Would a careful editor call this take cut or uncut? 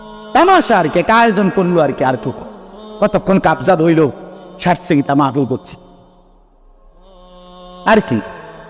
uncut